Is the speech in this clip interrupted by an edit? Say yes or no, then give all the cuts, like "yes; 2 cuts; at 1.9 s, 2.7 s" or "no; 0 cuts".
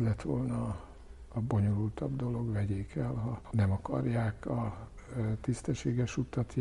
no; 0 cuts